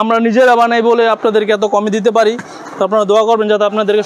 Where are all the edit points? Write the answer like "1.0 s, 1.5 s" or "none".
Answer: none